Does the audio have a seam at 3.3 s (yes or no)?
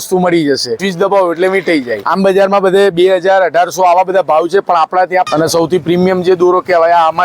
no